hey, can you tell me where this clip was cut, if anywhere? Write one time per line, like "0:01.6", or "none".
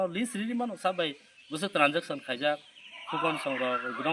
none